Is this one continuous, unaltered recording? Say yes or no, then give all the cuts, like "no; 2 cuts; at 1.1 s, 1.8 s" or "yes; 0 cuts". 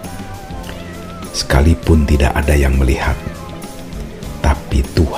yes; 0 cuts